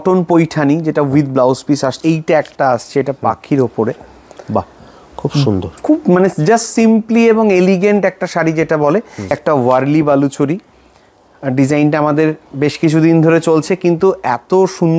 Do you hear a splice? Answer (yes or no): yes